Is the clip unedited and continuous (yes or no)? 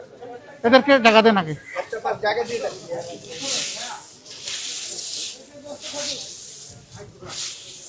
yes